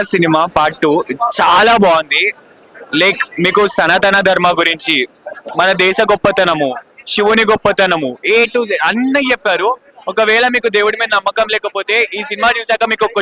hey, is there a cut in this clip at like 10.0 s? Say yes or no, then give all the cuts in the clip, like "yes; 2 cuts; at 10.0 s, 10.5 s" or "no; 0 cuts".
no; 0 cuts